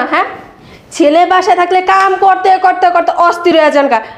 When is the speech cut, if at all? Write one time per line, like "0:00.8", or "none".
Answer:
none